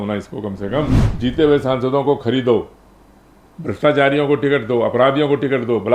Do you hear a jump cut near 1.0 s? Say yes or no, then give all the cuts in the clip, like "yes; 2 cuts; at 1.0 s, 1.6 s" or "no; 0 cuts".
yes; 1 cut; at 1.0 s